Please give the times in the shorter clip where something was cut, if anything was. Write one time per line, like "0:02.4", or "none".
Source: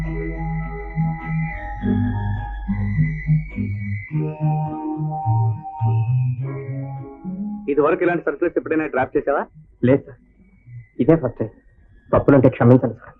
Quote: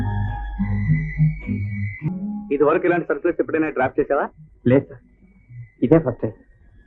0:02.1